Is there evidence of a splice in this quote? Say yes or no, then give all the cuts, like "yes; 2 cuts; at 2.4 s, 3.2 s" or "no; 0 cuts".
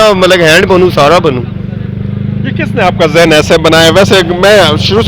no; 0 cuts